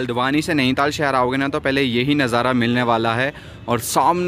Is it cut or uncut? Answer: uncut